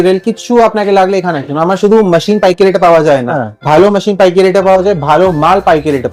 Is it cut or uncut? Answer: uncut